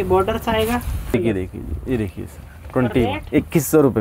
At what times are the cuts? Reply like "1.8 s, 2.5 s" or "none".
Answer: 1.1 s